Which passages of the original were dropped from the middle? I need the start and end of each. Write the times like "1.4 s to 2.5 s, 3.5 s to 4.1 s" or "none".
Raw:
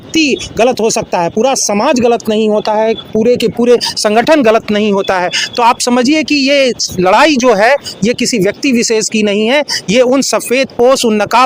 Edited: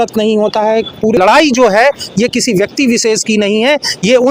3.3 s to 7.0 s